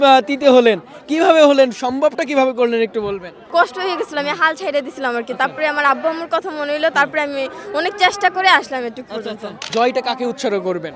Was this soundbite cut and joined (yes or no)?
yes